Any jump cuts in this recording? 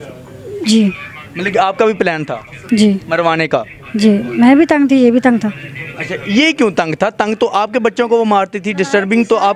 no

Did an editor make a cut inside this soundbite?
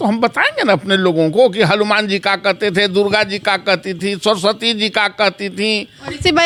no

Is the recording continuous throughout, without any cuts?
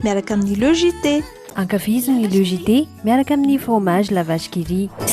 no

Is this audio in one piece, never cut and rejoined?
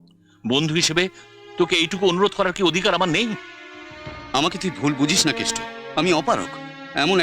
yes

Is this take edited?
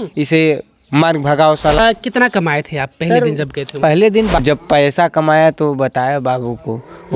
yes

